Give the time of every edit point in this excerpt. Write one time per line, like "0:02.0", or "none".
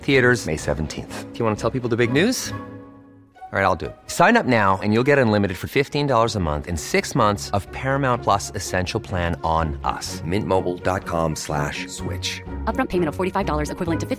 none